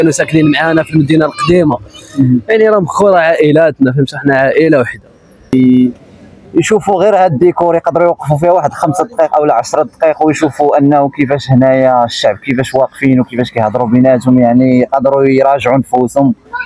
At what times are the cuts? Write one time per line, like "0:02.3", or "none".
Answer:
0:05.5